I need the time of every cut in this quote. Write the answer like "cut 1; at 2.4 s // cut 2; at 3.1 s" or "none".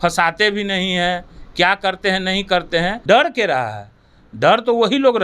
cut 1; at 3.0 s